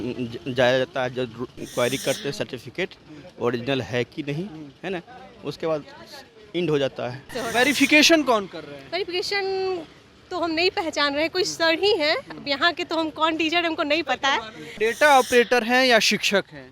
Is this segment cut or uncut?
cut